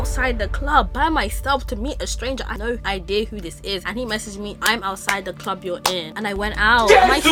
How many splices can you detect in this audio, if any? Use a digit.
0